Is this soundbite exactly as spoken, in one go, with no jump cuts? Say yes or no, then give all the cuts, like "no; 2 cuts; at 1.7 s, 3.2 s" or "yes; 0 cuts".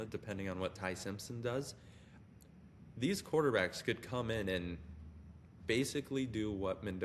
yes; 0 cuts